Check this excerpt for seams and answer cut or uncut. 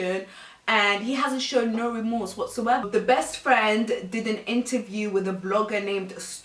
cut